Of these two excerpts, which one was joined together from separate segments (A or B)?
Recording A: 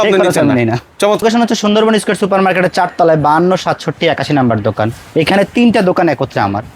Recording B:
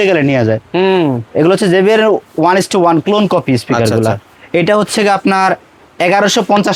A